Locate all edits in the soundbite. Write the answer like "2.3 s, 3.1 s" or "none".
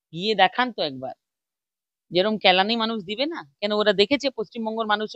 none